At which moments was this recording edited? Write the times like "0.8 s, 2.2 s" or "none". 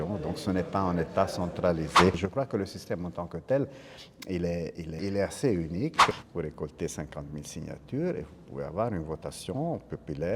2.2 s, 4.9 s, 6.1 s